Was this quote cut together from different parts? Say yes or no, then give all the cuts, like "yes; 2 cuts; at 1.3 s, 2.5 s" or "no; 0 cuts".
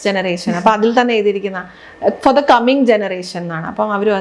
no; 0 cuts